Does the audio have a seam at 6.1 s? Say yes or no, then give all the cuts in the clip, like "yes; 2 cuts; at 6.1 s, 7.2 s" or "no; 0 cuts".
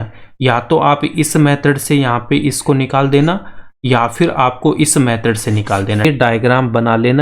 yes; 1 cut; at 6.1 s